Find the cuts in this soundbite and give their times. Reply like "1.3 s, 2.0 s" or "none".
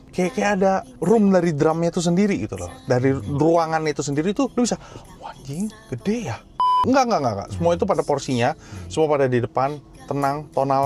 0.9 s, 4.5 s, 6.8 s